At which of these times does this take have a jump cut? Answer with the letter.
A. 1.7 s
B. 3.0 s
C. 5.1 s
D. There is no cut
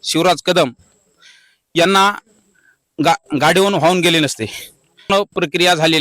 C